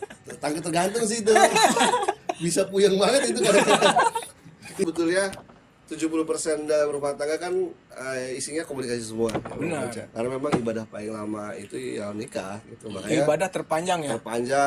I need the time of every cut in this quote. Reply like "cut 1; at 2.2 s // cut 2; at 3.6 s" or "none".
cut 1; at 4.9 s